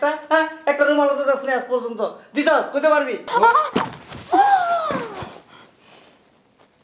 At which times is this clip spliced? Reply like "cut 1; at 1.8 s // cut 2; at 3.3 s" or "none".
cut 1; at 3.3 s